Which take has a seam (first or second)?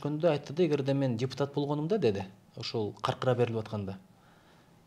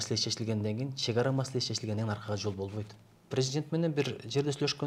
second